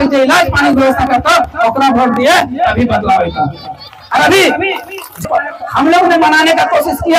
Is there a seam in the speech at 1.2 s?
no; 1 cut; at 5.3 s

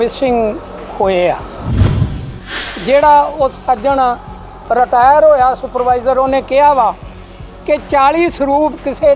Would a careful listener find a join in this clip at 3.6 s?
no; 1 cut; at 1.6 s

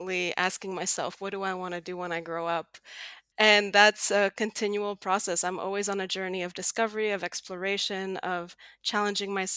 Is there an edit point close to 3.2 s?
yes; 1 cut; at 3.2 s

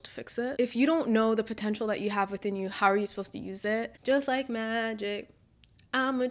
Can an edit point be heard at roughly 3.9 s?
yes; 1 cut; at 3.9 s

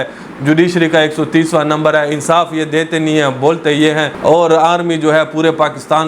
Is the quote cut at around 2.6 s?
no; 1 cut; at 4.1 s

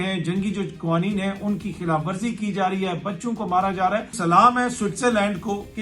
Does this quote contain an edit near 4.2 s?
yes; 1 cut; at 4.2 s

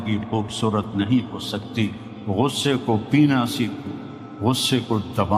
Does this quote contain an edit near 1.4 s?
no; 0 cuts

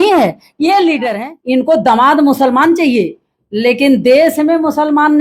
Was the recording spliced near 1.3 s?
yes; 1 cut; at 1.3 s

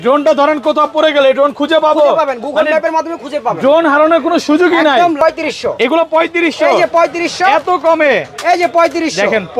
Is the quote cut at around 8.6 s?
no; 1 cut; at 5.2 s

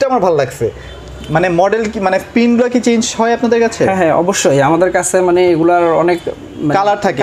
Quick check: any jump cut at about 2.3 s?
no; 0 cuts

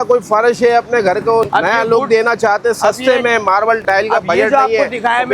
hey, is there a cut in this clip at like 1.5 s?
yes; 2 cuts; at 1.5 s, 3.8 s

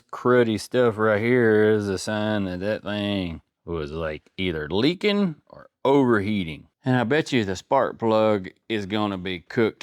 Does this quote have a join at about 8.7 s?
no; 2 cuts; at 3.5 s, 6.7 s

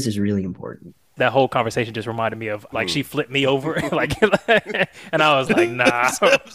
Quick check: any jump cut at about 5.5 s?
no; 2 cuts; at 1.1 s, 2.7 s

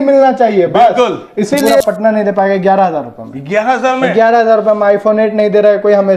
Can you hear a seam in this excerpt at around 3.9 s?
no; 1 cut; at 1.8 s

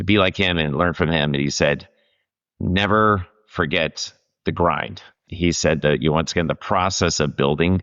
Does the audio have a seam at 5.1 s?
yes; 1 cut; at 5.1 s

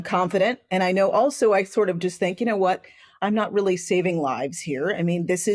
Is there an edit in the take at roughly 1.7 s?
no; 1 cut; at 3.0 s

